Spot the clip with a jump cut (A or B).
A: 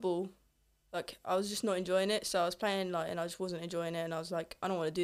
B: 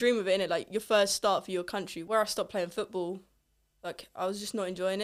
B